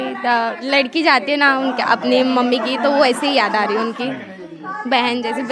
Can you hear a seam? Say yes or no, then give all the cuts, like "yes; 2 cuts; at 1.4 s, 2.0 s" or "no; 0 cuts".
no; 0 cuts